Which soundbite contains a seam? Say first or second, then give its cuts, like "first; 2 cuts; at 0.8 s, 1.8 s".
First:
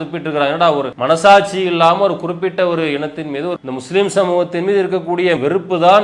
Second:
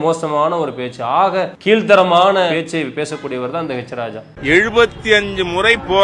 second; 2 cuts; at 1.5 s, 4.3 s